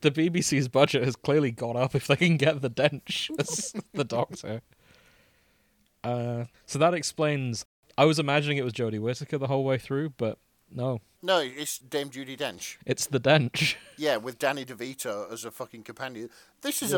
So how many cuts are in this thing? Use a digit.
3